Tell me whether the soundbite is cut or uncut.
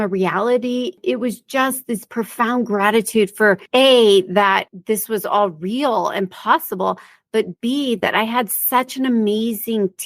cut